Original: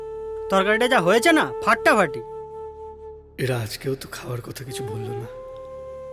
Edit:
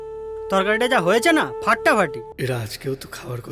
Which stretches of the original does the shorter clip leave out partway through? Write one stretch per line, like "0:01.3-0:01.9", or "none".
0:02.3-0:03.3